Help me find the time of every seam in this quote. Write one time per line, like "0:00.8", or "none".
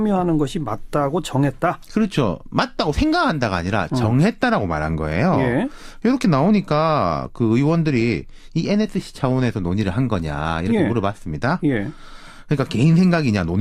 0:03.5